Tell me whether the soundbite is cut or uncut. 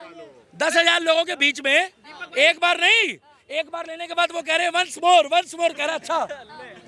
uncut